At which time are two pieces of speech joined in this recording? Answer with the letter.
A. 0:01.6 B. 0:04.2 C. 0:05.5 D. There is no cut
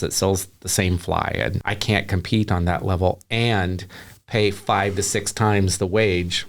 A